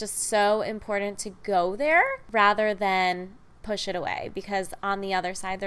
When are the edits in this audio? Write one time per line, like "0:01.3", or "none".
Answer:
0:02.2